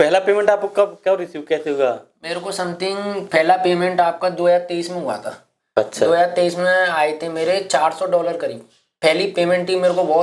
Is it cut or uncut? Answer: uncut